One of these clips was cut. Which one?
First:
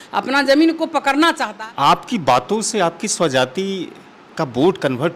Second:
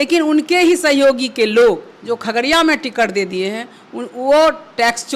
first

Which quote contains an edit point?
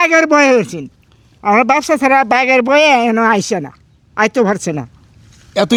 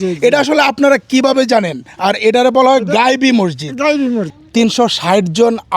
second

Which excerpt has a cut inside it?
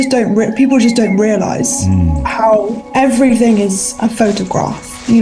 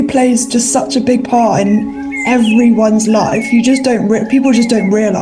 first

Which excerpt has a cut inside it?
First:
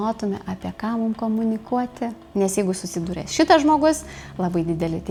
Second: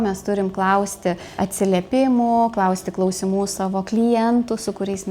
second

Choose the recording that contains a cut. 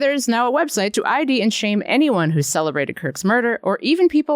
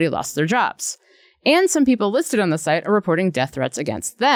first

